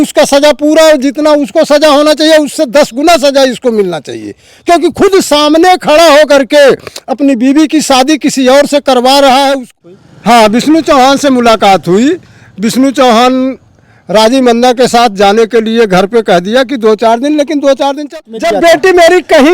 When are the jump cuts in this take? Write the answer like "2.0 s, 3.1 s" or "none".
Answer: 9.7 s, 18.0 s